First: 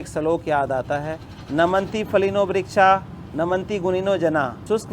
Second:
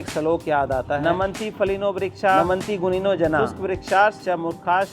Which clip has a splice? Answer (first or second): second